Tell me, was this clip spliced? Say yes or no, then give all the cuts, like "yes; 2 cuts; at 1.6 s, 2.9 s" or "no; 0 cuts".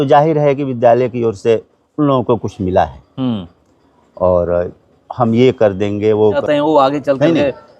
yes; 1 cut; at 6.4 s